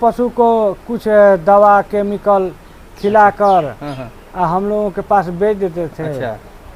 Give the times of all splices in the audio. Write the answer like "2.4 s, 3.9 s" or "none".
none